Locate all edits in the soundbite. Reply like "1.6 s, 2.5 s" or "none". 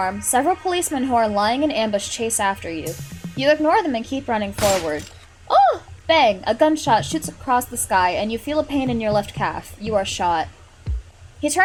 none